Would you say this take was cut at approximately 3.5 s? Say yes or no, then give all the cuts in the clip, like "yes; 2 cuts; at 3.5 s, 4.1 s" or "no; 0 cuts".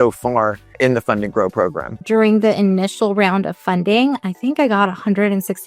no; 2 cuts; at 0.8 s, 2.0 s